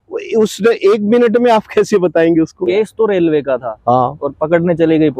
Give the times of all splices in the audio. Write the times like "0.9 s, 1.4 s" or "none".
2.6 s